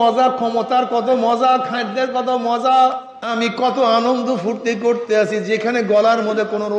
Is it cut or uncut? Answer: cut